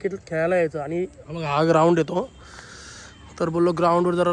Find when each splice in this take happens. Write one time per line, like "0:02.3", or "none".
none